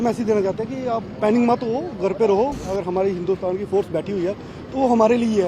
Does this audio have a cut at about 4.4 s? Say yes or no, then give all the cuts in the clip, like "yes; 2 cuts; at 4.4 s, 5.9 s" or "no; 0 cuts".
no; 1 cut; at 2.6 s